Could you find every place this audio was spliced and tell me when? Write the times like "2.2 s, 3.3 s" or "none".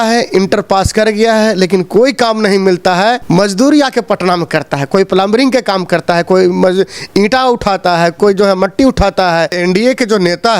9.6 s